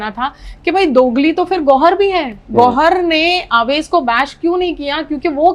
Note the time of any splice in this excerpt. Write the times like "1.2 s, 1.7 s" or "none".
none